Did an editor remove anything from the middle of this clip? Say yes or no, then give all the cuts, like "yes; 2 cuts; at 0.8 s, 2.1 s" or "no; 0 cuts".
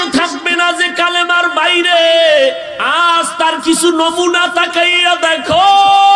yes; 1 cut; at 2.7 s